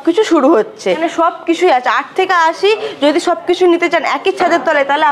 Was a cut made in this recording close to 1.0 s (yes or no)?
yes